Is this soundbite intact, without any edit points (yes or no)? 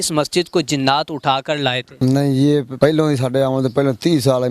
no